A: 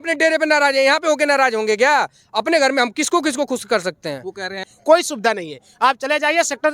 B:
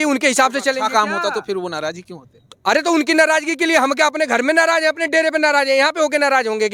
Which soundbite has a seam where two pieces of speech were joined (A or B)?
A